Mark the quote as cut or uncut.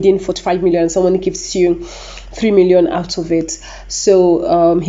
uncut